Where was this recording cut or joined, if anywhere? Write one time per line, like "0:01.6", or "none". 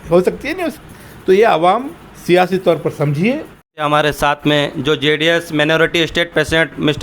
0:03.9